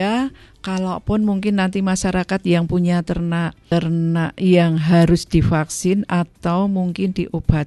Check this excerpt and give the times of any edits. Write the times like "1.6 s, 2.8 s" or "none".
3.6 s